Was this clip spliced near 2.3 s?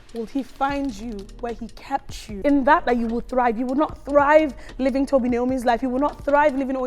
yes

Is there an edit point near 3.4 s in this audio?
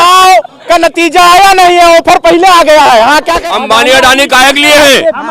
yes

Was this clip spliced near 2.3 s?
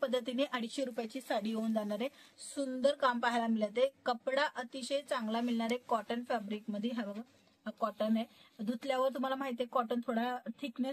yes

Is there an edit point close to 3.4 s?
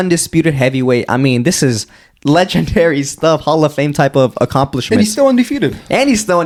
no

